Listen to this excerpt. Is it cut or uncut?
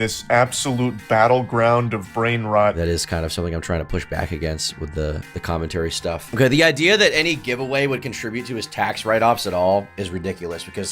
cut